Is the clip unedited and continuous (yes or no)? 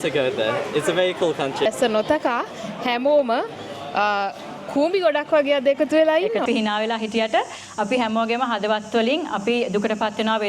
no